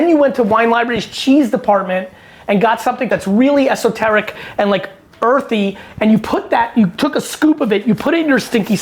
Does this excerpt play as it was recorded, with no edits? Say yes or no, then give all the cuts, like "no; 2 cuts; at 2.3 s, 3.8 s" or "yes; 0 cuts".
no; 1 cut; at 3.1 s